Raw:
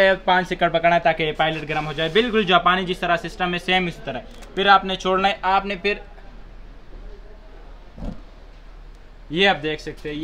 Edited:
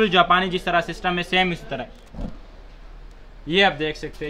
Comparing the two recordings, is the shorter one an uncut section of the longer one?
no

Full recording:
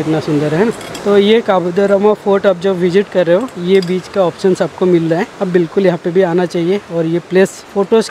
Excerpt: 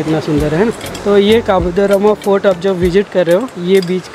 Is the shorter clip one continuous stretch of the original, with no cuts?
yes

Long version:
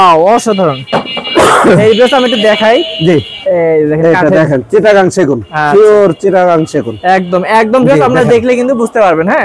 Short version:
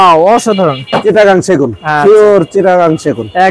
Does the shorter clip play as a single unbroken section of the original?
no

